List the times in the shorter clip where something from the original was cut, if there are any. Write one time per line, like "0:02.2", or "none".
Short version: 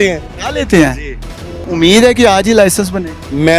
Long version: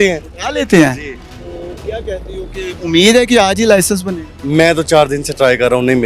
0:01.5